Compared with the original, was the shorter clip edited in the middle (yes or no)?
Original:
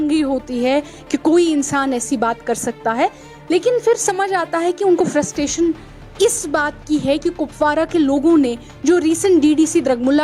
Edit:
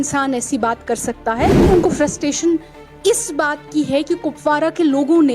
yes